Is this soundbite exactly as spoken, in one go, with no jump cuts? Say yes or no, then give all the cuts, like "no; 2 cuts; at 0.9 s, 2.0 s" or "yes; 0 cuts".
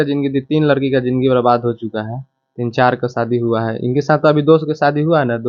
yes; 0 cuts